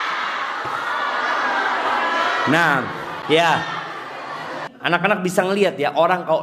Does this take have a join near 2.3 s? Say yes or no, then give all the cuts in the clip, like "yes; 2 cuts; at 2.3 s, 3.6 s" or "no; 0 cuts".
no; 1 cut; at 4.6 s